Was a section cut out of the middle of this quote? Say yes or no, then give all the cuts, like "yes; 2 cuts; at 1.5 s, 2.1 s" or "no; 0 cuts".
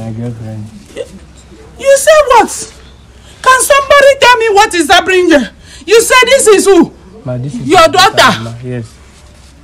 no; 0 cuts